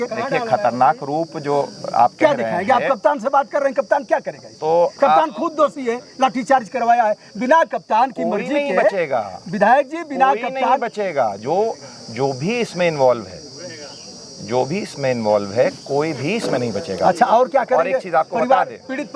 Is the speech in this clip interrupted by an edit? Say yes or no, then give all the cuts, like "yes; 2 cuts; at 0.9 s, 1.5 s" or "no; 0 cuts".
no; 0 cuts